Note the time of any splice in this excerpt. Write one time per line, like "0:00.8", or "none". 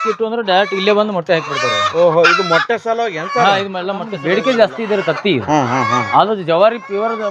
0:04.2